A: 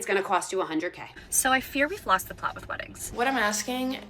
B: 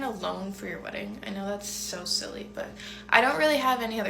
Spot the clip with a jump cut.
A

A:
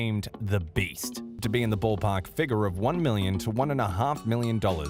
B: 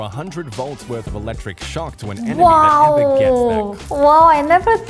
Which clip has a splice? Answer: B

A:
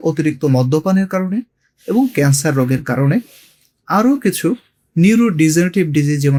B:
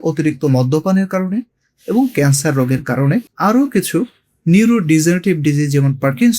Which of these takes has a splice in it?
B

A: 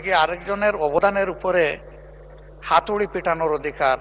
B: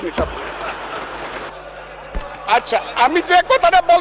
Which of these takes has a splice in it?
B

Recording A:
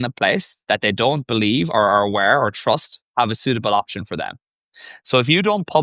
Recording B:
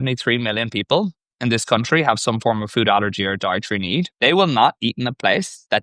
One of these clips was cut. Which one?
B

